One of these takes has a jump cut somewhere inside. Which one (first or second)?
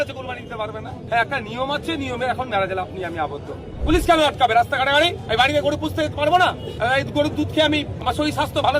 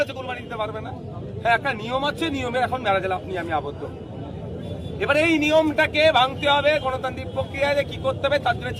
first